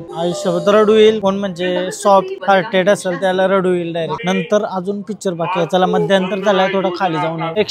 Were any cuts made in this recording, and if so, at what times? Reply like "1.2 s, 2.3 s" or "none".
none